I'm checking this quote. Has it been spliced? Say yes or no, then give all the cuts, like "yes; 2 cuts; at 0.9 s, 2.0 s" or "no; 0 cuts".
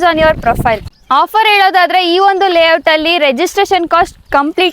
yes; 1 cut; at 1.0 s